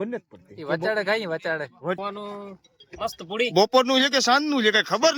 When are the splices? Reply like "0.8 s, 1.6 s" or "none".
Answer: 2.0 s